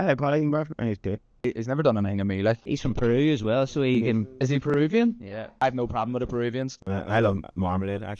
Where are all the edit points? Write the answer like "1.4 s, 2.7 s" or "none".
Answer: 5.6 s